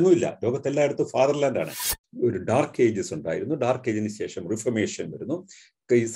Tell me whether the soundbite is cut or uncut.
cut